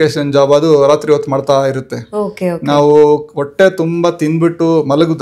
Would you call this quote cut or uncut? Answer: uncut